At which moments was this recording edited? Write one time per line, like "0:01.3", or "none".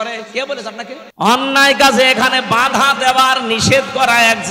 0:01.0